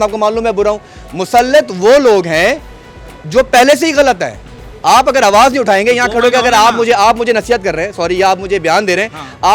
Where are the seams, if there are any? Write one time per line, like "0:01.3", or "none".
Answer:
none

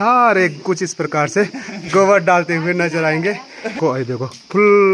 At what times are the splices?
0:03.8

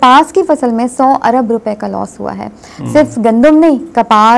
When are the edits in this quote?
none

